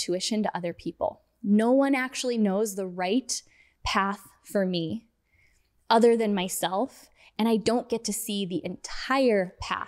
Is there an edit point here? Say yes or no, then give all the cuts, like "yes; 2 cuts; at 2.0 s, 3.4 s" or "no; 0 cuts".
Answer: no; 0 cuts